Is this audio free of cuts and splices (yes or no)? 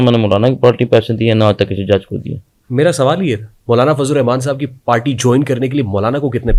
yes